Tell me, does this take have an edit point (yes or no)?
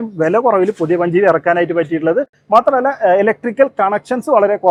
no